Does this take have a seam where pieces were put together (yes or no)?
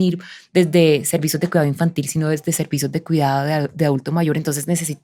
no